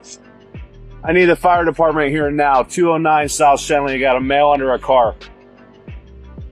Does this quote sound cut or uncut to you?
cut